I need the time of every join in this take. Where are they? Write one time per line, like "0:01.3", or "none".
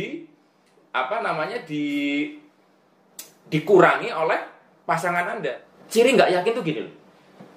0:05.7